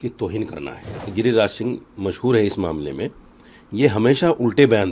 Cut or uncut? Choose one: cut